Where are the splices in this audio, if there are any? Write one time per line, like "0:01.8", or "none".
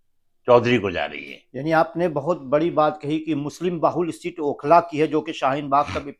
none

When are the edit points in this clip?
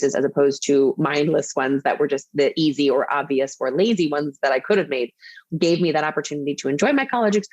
0:05.4

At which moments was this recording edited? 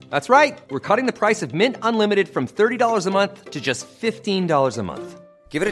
none

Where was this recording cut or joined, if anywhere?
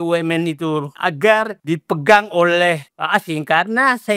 0:00.9
0:01.6
0:02.9

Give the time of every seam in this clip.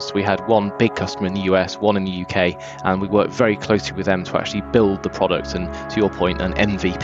none

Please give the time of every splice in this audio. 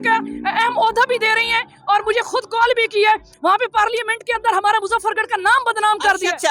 0:03.3

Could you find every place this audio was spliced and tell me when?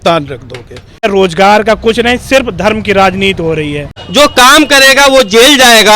0:01.0
0:03.9

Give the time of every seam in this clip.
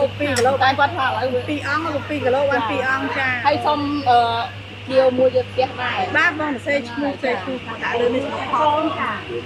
none

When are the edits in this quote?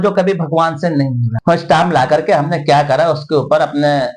0:01.2

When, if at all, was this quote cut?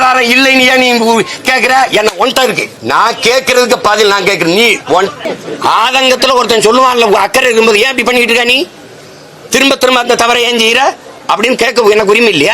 0:02.7
0:05.2

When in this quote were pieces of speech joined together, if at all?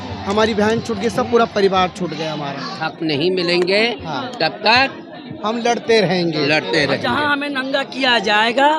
0:02.8

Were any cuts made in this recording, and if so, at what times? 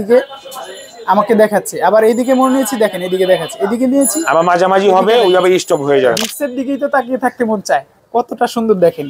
0:06.2
0:07.9

